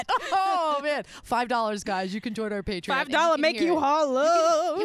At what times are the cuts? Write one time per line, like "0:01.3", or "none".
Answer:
none